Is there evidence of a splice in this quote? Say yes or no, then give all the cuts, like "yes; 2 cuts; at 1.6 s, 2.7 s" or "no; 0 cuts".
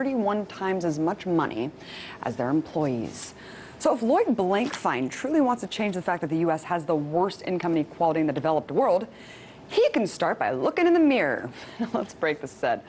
no; 0 cuts